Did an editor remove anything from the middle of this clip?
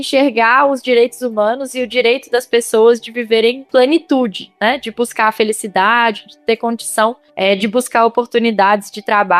no; 0 cuts

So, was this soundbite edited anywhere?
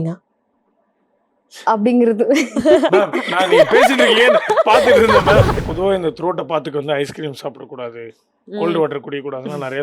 yes; 1 cut; at 5.6 s

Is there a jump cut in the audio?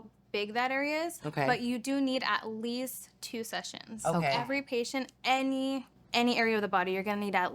no; 0 cuts

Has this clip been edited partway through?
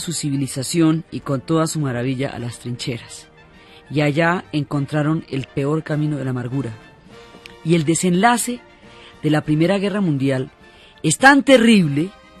no; 0 cuts

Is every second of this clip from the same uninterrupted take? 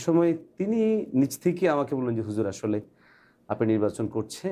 yes; 0 cuts

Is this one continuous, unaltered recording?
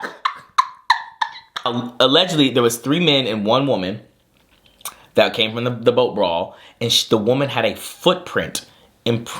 no; 1 cut; at 1.7 s

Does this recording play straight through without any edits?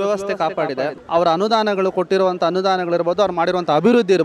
no; 1 cut; at 1.0 s

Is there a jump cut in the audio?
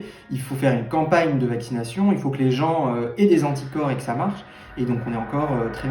no; 0 cuts

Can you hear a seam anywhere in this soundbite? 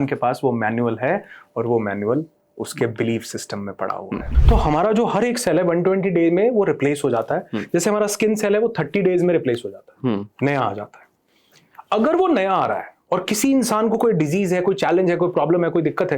yes; 1 cut; at 4.3 s

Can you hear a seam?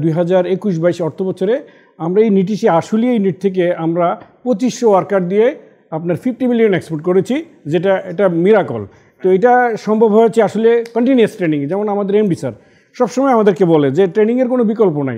no; 0 cuts

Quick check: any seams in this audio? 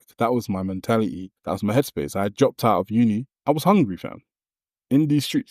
yes; 2 cuts; at 1.3 s, 3.3 s

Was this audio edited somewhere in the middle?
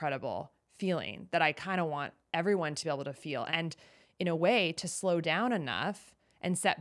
yes; 1 cut; at 3.5 s

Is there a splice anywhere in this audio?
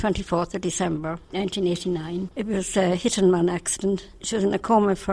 yes; 3 cuts; at 1.2 s, 2.3 s, 4.1 s

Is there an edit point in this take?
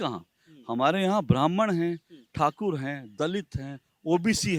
no; 0 cuts

